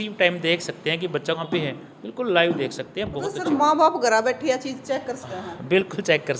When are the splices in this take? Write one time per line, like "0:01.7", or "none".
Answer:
0:01.4